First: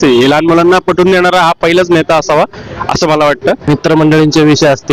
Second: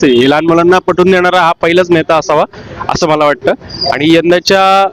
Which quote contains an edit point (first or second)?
first